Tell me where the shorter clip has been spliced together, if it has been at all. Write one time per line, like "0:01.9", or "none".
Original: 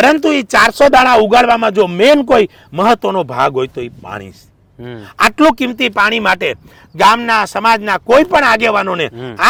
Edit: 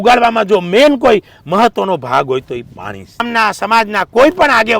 0:03.2